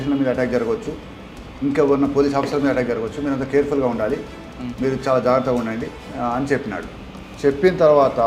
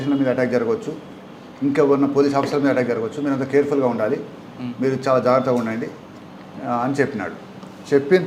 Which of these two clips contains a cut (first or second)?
first